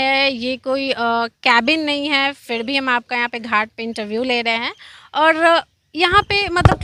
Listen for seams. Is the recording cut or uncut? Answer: uncut